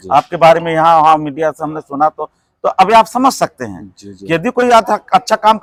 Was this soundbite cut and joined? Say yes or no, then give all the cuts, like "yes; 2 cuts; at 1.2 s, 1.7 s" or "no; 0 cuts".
no; 0 cuts